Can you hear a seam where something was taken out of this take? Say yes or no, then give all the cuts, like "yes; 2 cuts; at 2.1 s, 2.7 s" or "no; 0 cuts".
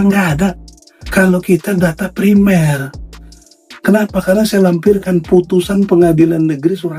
yes; 1 cut; at 1.0 s